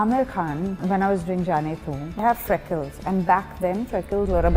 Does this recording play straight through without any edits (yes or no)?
no